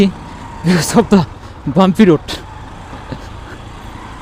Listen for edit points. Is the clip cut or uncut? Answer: uncut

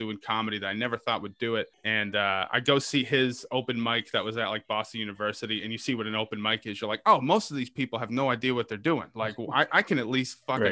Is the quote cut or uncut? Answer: cut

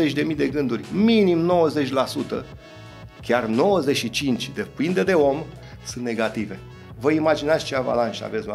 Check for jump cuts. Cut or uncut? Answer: uncut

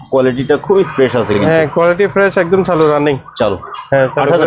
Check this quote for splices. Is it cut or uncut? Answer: uncut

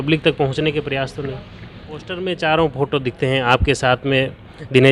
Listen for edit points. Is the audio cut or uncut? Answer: cut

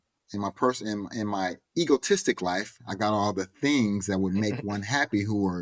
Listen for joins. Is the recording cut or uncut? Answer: uncut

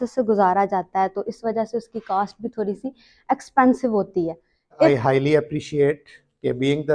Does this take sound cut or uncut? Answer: cut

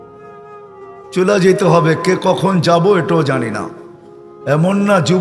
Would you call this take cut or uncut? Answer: uncut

